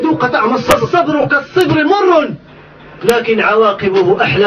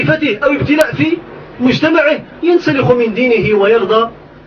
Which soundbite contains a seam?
first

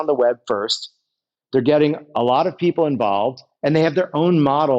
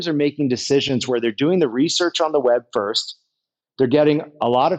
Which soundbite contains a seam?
first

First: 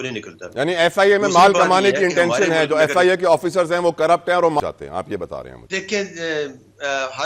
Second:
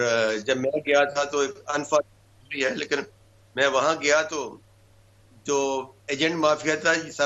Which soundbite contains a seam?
first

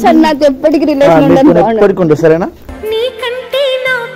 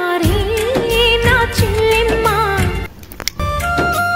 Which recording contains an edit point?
second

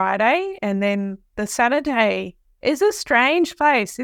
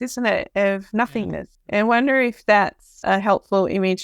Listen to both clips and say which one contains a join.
second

